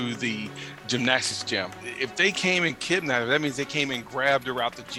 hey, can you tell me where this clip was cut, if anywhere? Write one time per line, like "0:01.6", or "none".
none